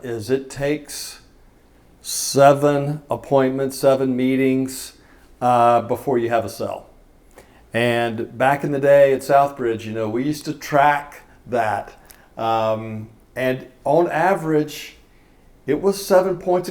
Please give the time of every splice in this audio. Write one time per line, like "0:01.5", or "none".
none